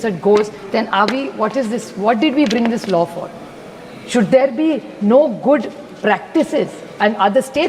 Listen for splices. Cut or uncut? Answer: uncut